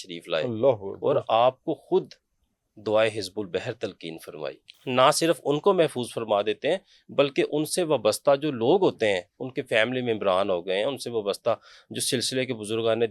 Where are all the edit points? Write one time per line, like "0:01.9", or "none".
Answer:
0:04.8

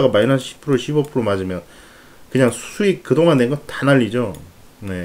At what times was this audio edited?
none

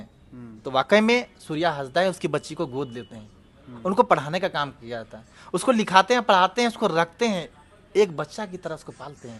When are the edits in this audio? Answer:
none

